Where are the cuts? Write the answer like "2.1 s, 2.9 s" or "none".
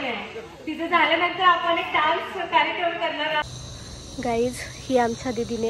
3.4 s